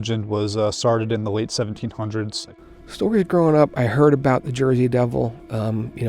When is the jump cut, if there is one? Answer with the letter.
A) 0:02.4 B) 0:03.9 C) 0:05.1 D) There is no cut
A